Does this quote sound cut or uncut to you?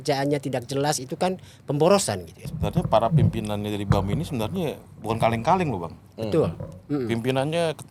cut